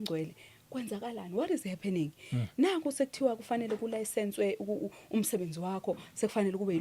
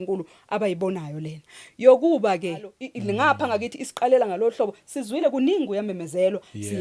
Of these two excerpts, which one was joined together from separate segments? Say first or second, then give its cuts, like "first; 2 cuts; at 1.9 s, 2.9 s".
second; 1 cut; at 2.8 s